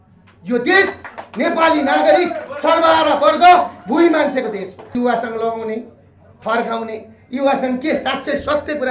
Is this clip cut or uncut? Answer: cut